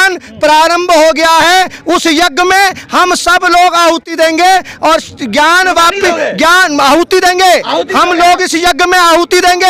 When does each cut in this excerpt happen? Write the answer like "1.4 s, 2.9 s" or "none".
none